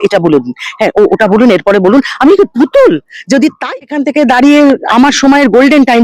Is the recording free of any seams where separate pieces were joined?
no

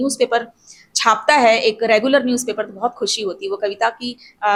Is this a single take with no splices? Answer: yes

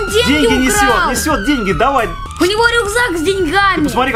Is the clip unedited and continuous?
no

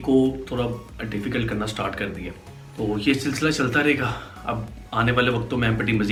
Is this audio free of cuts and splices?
yes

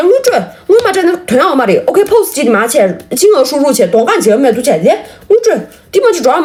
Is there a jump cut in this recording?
no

